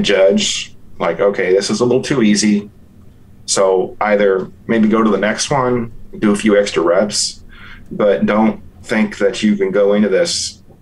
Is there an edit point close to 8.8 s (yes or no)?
yes